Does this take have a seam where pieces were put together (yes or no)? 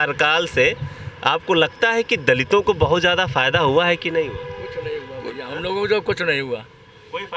no